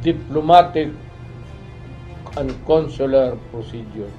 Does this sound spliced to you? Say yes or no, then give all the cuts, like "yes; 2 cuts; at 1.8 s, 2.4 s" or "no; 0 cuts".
no; 0 cuts